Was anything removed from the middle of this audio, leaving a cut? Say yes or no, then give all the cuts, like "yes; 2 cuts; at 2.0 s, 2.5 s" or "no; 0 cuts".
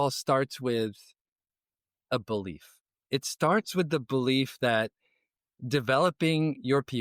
no; 0 cuts